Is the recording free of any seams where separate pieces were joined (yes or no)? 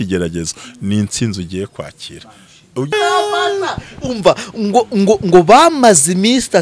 no